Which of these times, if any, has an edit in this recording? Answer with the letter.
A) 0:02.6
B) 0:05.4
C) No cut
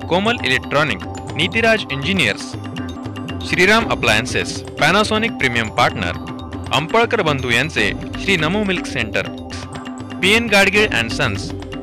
C